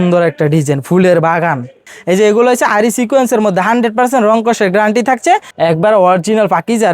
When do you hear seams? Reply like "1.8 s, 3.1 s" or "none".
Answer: 1.9 s, 5.5 s